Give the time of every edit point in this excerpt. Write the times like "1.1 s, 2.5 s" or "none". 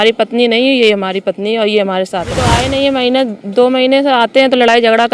2.6 s